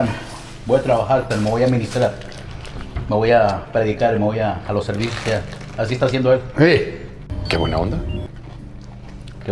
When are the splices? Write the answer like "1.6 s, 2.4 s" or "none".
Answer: none